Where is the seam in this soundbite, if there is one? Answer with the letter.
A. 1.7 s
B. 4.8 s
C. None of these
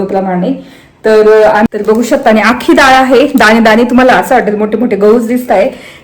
A